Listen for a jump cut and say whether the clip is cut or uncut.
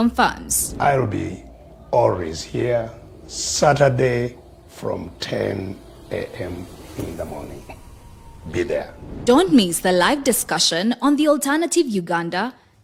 uncut